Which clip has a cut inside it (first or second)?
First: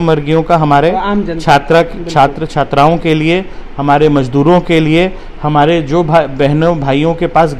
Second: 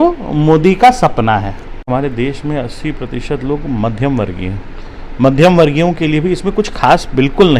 second